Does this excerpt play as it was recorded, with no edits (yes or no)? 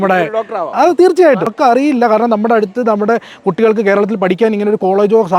no